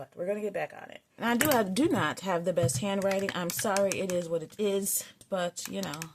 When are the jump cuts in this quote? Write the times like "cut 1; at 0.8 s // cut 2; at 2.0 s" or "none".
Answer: cut 1; at 1.1 s // cut 2; at 5.2 s